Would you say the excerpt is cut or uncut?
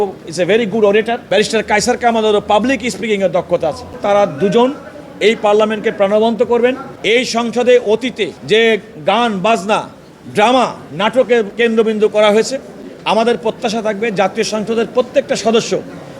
cut